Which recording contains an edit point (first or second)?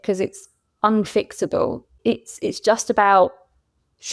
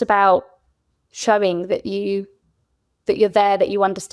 first